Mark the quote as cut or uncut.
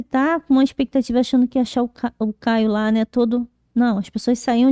uncut